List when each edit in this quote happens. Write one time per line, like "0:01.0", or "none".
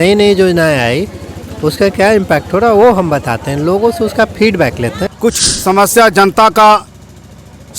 0:05.0